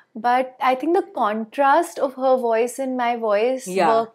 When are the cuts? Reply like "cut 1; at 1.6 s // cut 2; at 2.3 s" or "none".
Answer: none